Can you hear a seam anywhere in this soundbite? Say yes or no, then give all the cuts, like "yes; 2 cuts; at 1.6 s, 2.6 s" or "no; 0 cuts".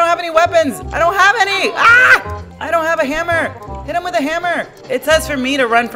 no; 0 cuts